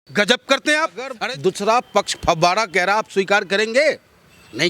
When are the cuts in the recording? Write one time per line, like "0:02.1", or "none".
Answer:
0:01.2